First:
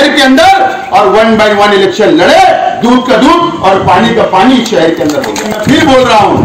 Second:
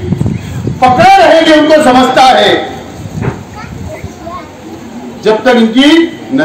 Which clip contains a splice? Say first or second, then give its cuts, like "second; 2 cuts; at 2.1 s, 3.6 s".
first; 1 cut; at 5.4 s